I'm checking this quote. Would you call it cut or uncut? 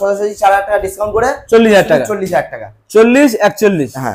uncut